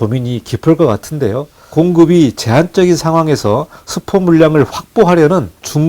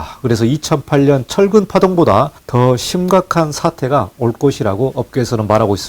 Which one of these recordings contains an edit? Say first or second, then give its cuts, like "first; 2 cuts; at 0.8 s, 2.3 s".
first; 1 cut; at 1.6 s